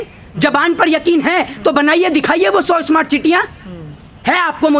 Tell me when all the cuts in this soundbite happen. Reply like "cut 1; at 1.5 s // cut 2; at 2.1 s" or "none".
none